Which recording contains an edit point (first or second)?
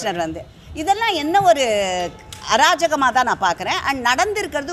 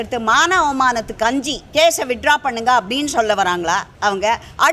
second